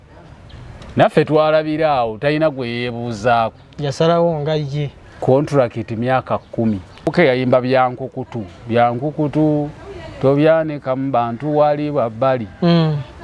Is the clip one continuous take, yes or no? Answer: no